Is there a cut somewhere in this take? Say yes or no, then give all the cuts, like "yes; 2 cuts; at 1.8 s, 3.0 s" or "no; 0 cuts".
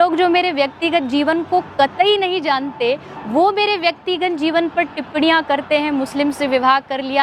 no; 0 cuts